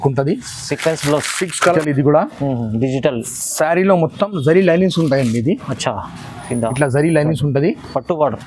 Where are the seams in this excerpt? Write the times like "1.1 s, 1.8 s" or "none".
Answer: 1.7 s